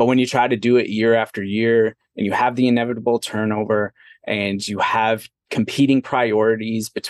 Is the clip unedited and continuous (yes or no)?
yes